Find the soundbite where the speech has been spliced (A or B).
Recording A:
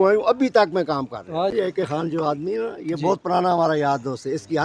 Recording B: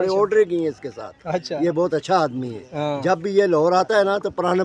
A